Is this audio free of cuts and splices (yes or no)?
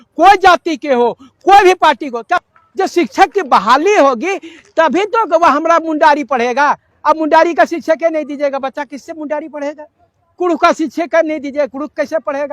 no